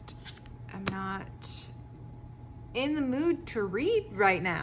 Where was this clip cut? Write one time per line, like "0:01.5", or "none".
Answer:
none